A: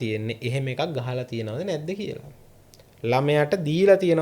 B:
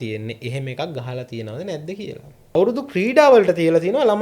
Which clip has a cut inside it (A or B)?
B